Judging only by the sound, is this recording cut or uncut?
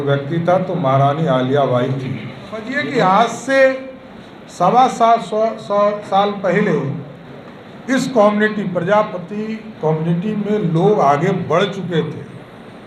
cut